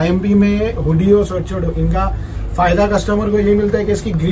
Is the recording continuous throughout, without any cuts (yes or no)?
yes